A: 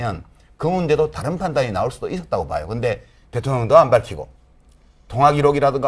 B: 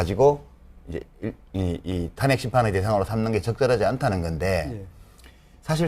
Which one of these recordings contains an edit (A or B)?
B